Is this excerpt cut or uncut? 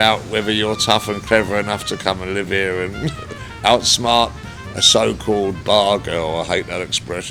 uncut